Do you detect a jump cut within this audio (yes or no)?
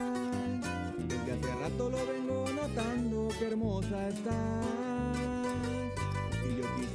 no